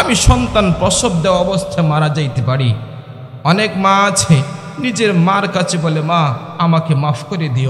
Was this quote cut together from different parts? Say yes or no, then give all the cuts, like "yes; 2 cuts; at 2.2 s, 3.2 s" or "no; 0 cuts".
no; 0 cuts